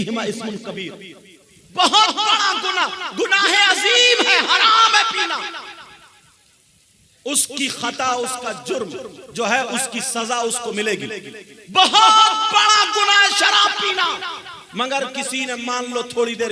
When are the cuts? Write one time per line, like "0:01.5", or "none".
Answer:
none